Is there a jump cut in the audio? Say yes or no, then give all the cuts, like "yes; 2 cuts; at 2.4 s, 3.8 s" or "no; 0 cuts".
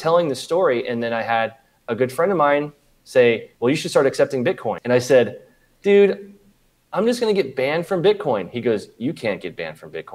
yes; 2 cuts; at 3.5 s, 4.8 s